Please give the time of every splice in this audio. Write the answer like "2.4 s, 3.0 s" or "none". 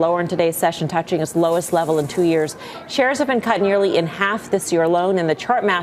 none